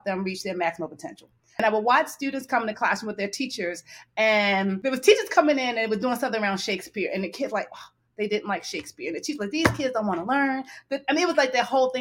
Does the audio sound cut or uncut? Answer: cut